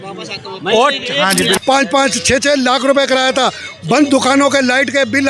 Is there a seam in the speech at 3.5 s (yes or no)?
no